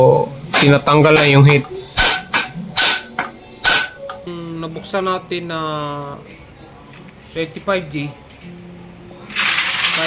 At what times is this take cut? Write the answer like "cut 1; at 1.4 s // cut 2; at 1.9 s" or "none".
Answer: cut 1; at 4.3 s